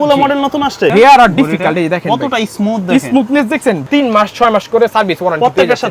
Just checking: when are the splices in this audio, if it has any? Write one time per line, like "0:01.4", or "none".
0:00.9
0:03.8